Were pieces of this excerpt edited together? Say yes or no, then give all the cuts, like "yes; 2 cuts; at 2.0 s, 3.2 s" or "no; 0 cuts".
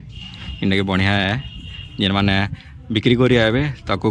no; 0 cuts